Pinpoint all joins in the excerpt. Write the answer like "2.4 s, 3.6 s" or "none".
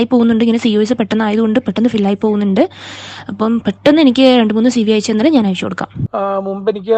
6.0 s